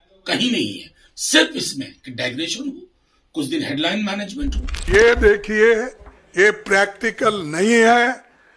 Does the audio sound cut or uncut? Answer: cut